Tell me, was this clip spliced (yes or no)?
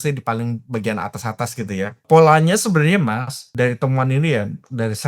yes